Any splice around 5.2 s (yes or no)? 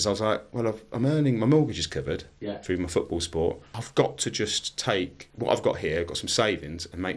yes